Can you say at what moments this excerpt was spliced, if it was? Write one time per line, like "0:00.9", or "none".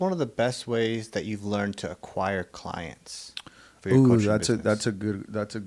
none